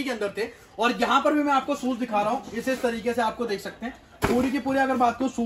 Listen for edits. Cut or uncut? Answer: uncut